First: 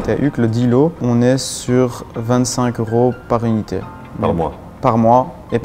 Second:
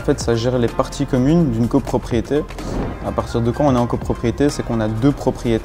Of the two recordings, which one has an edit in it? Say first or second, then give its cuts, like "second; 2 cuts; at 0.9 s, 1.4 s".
first; 2 cuts; at 1.0 s, 4.2 s